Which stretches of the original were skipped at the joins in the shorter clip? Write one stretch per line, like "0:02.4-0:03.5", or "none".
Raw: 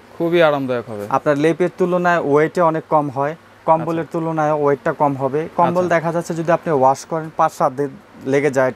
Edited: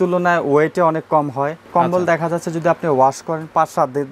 0:03.5-0:05.5

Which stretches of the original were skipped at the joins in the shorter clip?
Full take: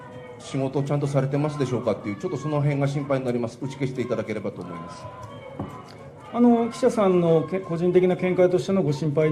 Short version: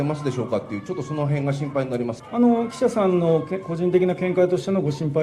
0:03.6-0:06.2

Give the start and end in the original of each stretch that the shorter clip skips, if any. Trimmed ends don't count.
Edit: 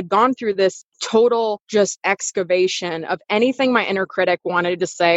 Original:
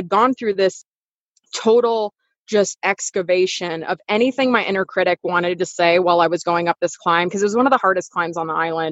0:00.9-0:01.4
0:02.1-0:02.4

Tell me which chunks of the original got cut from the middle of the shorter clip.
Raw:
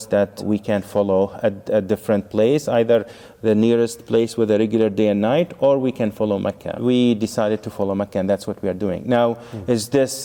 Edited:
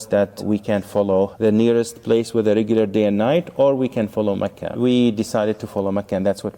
0:01.3-0:03.4

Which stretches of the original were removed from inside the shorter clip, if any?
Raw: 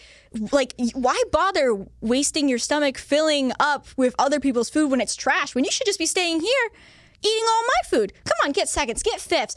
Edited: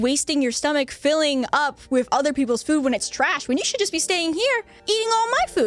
0:06.8-0:07.1

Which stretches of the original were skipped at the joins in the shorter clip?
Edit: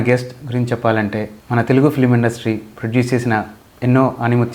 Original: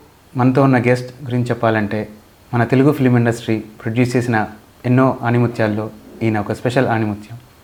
0:02.1-0:02.4

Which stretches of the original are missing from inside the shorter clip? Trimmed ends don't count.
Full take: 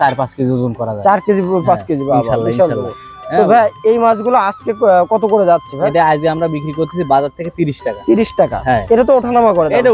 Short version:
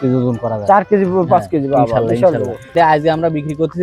0:03.1-0:05.9

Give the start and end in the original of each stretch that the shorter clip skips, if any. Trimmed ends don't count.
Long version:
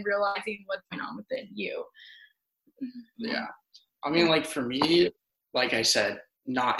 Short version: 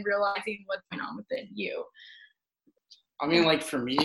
0:02.7-0:03.5

